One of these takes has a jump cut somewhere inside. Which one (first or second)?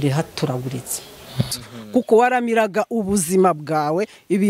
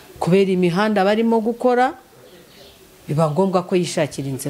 first